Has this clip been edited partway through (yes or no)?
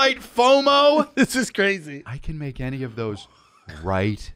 yes